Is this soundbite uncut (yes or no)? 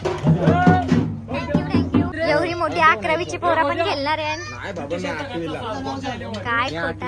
no